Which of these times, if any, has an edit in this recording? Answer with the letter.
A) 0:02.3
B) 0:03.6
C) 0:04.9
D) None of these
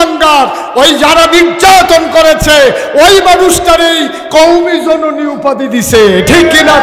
D